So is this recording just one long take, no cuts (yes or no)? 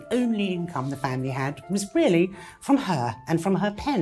yes